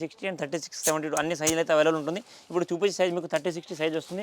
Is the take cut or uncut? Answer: uncut